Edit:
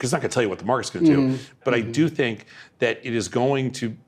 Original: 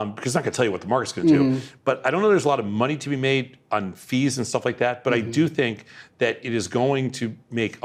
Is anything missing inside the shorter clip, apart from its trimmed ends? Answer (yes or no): yes